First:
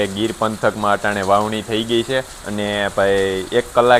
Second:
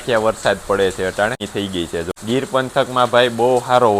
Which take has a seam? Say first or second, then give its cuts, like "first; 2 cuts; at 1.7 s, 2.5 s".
second; 1 cut; at 1.5 s